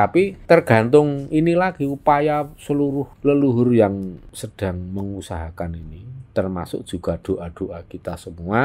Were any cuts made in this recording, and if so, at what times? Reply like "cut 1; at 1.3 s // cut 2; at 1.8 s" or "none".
none

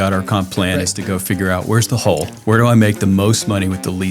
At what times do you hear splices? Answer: cut 1; at 2.3 s

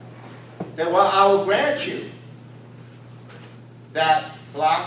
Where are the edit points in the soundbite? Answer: none

